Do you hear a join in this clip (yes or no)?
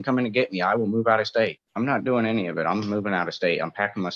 yes